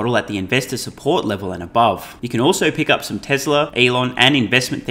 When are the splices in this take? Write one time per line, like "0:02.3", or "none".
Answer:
0:02.2
0:03.7